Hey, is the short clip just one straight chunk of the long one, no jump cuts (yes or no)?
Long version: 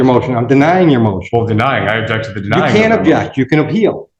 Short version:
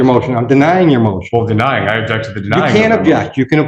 yes